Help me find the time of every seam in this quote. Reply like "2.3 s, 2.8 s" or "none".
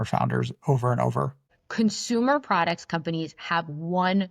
1.5 s